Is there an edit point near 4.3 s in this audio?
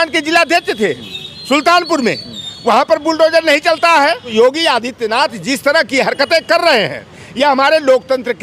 yes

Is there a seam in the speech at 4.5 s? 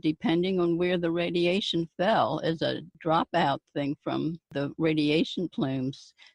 yes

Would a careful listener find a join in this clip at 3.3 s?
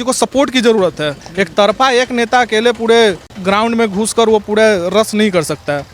yes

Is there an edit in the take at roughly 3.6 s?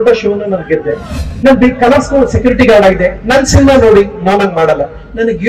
no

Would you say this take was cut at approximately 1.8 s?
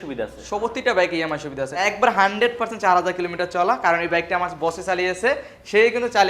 yes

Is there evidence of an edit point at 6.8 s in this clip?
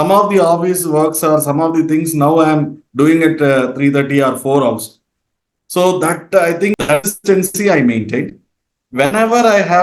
yes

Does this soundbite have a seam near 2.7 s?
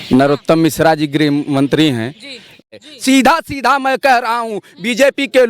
yes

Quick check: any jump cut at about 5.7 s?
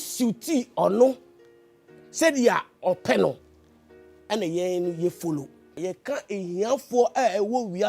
yes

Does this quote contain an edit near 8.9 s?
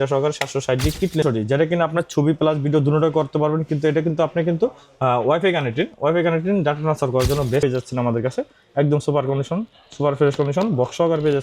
no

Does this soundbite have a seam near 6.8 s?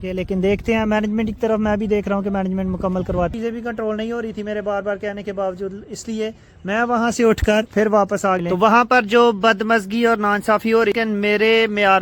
no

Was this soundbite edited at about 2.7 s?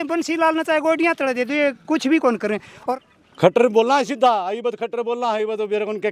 yes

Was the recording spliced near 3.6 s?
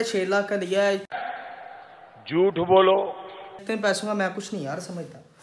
yes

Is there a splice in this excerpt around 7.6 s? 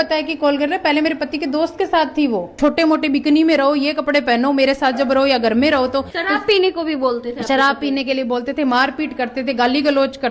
no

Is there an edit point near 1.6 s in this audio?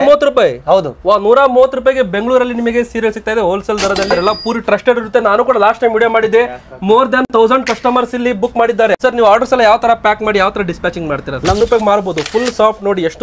no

